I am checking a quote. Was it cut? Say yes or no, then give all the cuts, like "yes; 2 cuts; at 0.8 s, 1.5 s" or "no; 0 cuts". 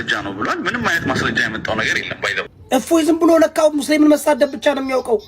yes; 1 cut; at 2.6 s